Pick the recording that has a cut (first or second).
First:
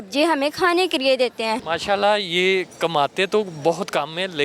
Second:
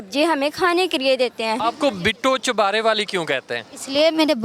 second